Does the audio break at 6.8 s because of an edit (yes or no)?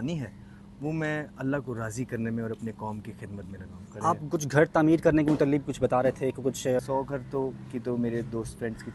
yes